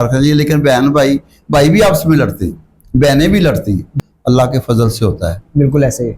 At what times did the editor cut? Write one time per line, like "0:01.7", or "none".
0:03.9